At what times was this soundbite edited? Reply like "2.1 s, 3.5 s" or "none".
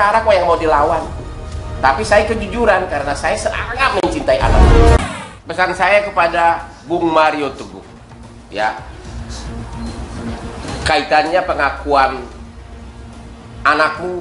5.0 s